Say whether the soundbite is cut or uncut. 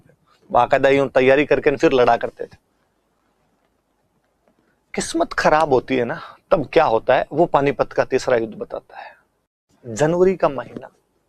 uncut